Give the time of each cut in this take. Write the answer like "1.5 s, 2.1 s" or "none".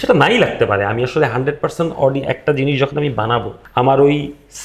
3.6 s